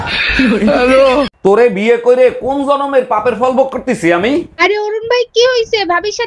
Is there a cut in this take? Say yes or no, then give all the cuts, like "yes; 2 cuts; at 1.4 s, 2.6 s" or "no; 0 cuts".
yes; 1 cut; at 1.3 s